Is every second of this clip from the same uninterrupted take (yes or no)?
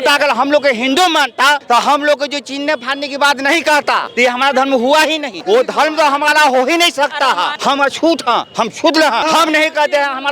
no